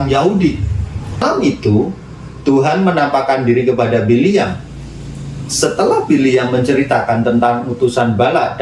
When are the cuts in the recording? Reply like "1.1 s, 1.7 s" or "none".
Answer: 1.2 s

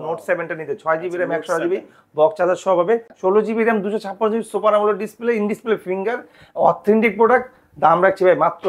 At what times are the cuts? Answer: 3.1 s

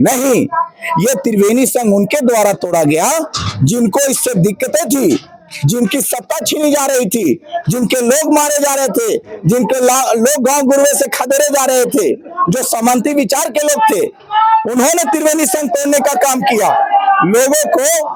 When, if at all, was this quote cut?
none

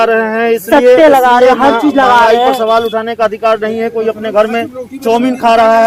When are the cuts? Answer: none

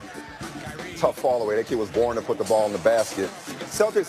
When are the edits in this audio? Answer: none

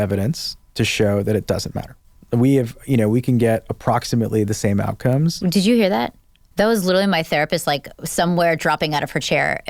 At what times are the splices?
none

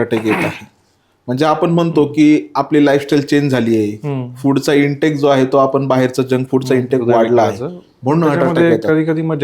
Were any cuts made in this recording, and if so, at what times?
8.5 s

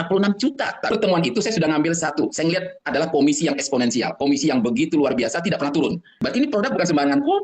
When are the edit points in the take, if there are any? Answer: 0.9 s, 6.1 s

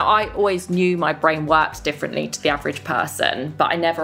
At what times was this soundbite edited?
none

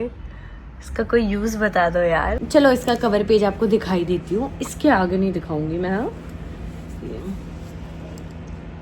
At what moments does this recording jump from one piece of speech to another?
2.4 s

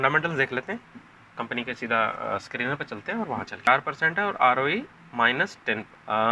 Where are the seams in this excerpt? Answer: 3.7 s

